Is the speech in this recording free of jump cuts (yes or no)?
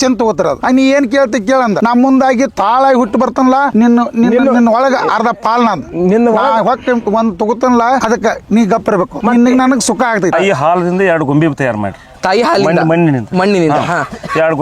no